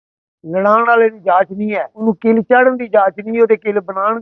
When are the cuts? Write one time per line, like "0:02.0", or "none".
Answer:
0:02.0